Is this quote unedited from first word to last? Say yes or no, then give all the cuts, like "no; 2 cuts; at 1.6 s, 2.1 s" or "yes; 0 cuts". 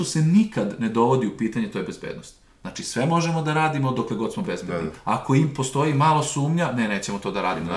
yes; 0 cuts